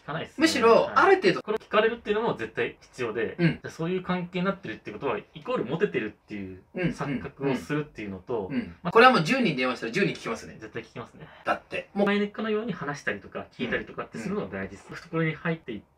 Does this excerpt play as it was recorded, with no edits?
no; 5 cuts; at 1.5 s, 3.6 s, 8.8 s, 12.1 s, 15.0 s

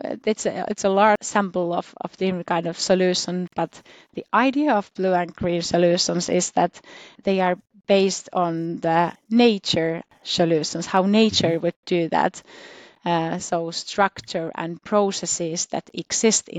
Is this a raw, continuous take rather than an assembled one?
no; 4 cuts; at 1.3 s, 7.2 s, 9.2 s, 10.2 s

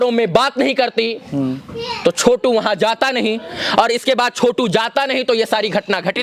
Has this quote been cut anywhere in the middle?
no; 0 cuts

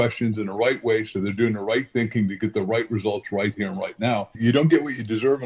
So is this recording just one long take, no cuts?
no; 1 cut; at 4.3 s

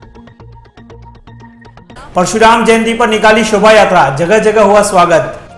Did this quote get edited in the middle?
yes; 1 cut; at 1.4 s

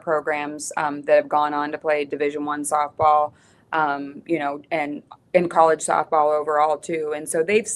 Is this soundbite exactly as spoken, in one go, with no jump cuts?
yes; 0 cuts

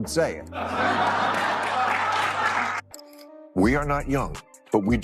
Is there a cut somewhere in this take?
yes; 1 cut; at 2.8 s

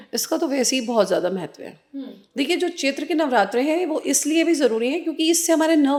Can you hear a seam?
no; 0 cuts

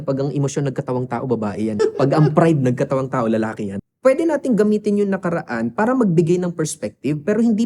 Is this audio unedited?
no; 2 cuts; at 1.8 s, 3.8 s

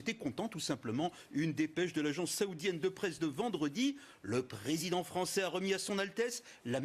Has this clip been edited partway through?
no; 0 cuts

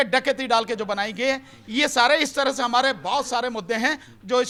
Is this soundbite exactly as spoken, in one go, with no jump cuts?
yes; 0 cuts

